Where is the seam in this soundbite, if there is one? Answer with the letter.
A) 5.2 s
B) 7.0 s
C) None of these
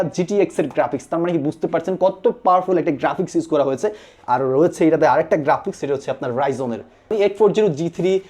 B